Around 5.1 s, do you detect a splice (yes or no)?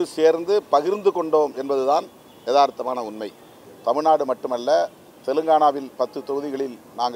no